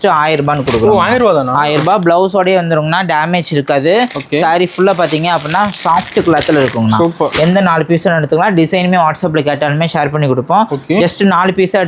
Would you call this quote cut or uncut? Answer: uncut